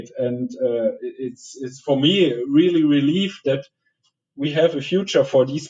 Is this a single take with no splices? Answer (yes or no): yes